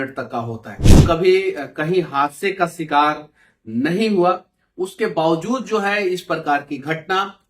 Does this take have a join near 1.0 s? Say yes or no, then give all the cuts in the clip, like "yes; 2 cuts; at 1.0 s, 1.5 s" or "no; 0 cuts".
yes; 1 cut; at 1.0 s